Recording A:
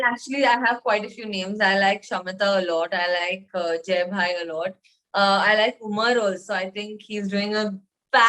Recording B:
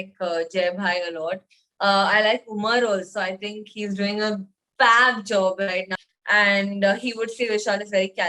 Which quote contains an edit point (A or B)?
B